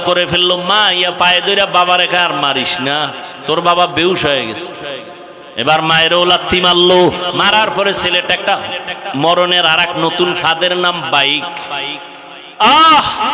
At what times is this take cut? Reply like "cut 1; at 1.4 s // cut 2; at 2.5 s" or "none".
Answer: cut 1; at 12.4 s